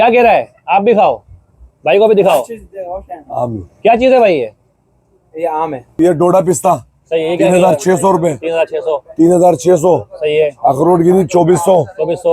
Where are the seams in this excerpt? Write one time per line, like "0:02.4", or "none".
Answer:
0:05.8